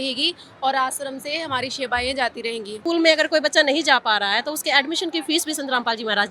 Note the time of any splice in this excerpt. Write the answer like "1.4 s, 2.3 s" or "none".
2.8 s

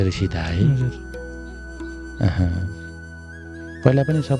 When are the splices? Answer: none

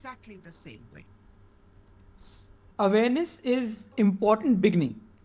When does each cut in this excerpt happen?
2.6 s

